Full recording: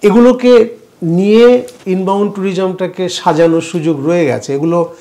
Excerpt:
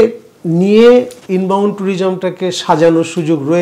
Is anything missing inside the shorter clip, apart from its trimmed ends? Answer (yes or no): no